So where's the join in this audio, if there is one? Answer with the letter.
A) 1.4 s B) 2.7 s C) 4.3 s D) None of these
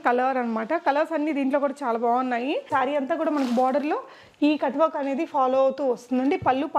B